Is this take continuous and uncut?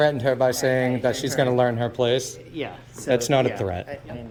yes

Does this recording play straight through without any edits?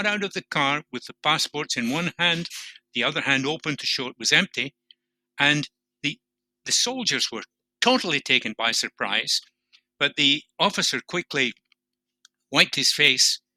yes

